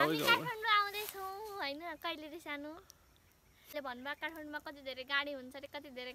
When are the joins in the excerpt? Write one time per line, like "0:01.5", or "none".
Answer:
0:03.7

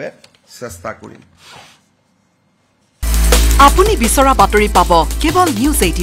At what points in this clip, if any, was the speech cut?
0:03.1

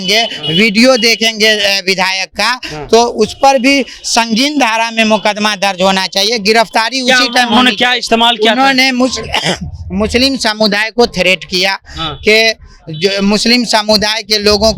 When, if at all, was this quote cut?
none

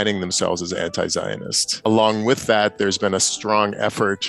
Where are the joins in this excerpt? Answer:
0:01.8

